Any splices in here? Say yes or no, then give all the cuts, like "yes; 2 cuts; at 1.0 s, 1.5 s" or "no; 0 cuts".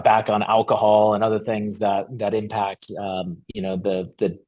no; 0 cuts